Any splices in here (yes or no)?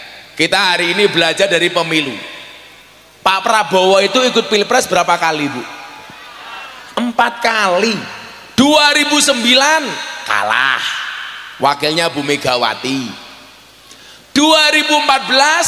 no